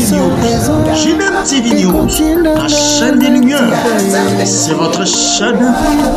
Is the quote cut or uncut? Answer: uncut